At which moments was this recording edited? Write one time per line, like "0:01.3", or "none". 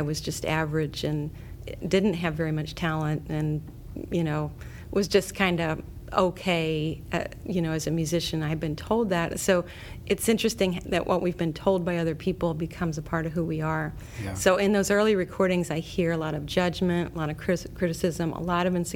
none